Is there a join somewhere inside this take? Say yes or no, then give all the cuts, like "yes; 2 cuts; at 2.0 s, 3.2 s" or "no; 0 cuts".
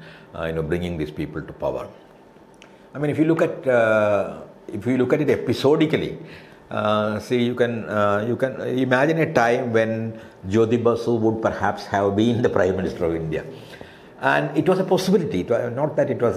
no; 0 cuts